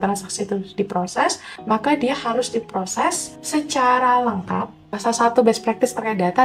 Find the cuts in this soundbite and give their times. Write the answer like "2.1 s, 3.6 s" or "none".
1.5 s, 3.3 s, 4.9 s